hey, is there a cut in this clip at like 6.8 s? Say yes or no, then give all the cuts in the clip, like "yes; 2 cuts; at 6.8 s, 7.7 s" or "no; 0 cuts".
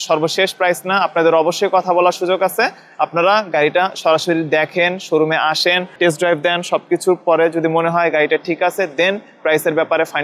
no; 0 cuts